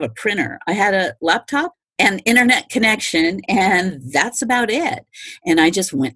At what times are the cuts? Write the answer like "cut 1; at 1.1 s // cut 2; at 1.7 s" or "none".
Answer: cut 1; at 1.8 s